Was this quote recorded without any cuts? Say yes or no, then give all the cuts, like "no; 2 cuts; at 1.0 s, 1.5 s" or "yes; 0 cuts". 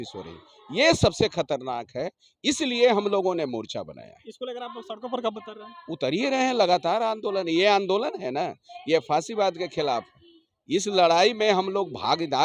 yes; 0 cuts